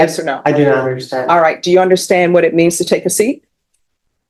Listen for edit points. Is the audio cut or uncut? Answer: uncut